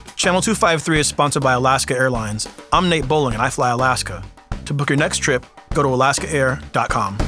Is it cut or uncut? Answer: uncut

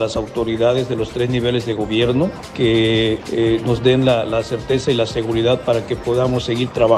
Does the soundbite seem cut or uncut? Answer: cut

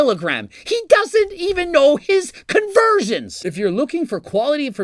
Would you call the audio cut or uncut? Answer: cut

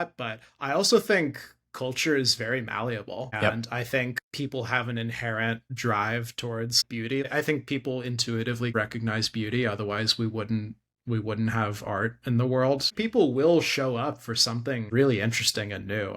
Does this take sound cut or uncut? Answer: cut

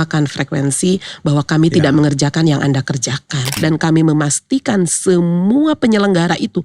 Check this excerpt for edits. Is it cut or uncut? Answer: cut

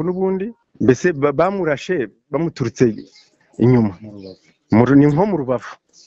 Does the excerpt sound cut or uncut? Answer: uncut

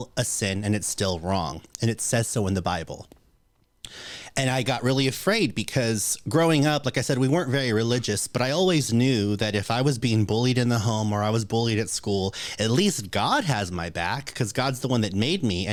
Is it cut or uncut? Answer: uncut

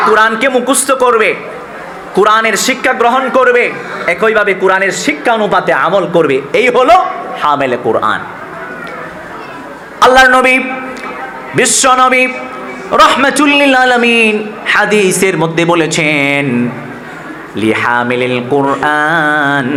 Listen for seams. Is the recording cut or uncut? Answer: uncut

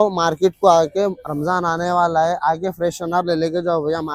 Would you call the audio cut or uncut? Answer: uncut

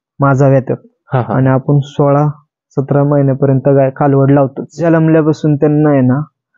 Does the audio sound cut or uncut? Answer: cut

